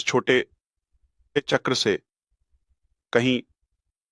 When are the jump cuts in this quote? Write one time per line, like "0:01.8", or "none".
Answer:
0:01.4